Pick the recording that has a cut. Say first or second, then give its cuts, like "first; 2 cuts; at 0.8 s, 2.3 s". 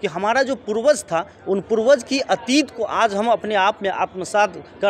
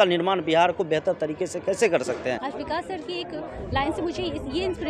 second; 1 cut; at 2.4 s